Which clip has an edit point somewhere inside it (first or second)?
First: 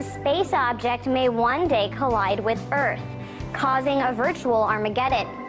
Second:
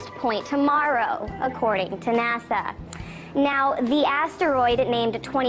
first